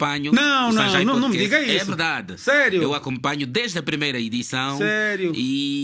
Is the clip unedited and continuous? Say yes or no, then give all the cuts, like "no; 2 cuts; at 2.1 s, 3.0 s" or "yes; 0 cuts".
yes; 0 cuts